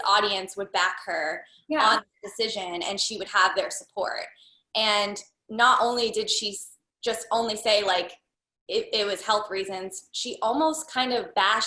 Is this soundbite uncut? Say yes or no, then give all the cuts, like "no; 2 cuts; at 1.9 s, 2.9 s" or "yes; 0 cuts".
yes; 0 cuts